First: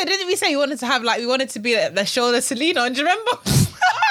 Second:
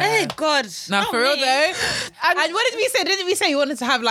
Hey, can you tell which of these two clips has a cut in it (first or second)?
second